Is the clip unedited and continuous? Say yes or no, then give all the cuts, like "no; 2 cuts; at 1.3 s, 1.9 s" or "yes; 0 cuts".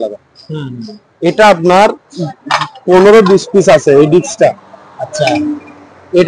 yes; 0 cuts